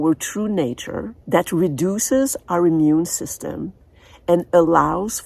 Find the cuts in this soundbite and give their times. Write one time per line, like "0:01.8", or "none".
0:01.1